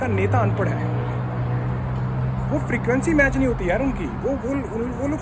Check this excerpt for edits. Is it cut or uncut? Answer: uncut